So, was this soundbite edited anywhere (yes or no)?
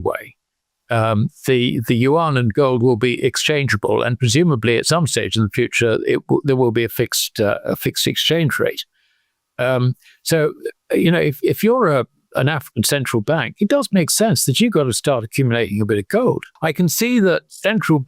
yes